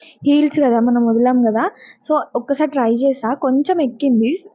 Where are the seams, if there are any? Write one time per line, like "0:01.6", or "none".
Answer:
none